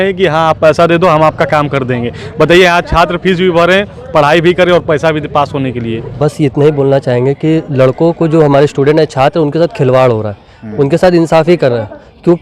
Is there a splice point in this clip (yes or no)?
yes